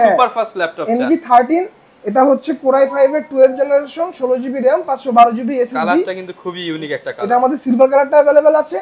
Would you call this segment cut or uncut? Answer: uncut